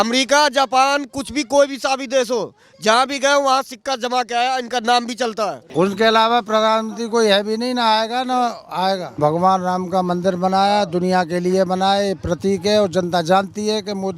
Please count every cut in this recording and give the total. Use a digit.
2